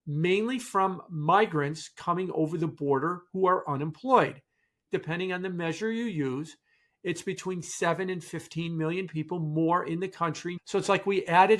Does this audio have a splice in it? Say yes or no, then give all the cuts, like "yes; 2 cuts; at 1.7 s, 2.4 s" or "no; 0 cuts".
yes; 2 cuts; at 4.8 s, 10.5 s